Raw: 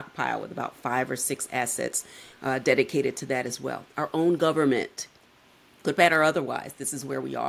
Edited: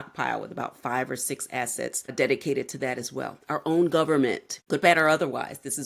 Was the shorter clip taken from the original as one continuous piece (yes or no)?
no